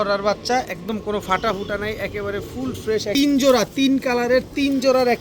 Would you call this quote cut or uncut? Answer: cut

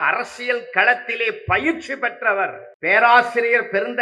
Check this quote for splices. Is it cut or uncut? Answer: cut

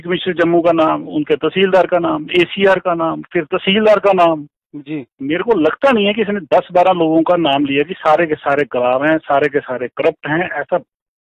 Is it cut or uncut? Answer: uncut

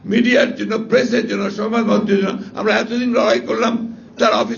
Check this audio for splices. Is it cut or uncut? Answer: uncut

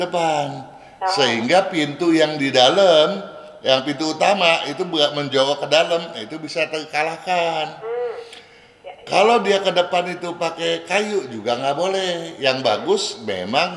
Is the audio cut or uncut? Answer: uncut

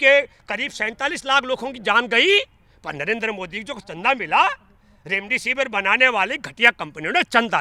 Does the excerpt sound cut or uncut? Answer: uncut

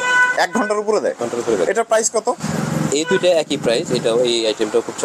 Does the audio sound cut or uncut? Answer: uncut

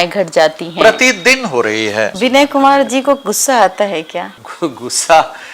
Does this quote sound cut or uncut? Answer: cut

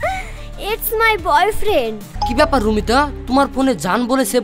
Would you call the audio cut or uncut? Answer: cut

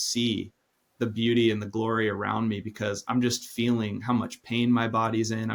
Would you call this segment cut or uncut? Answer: uncut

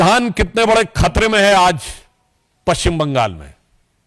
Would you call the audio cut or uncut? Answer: uncut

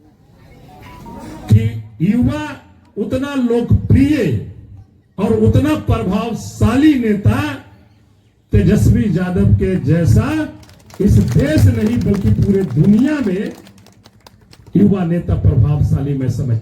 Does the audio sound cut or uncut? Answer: uncut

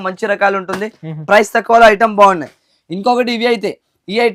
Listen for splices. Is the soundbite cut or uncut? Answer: uncut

